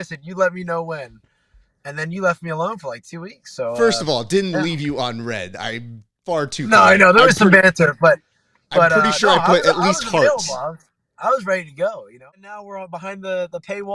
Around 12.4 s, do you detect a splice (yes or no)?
yes